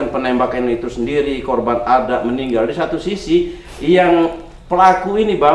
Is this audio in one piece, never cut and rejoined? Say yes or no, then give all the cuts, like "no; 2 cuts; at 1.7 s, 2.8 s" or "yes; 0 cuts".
yes; 0 cuts